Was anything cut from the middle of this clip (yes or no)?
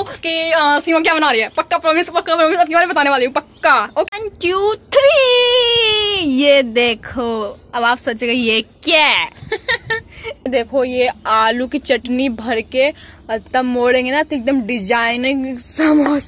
yes